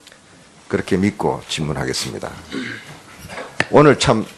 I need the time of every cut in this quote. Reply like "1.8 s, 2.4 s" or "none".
2.8 s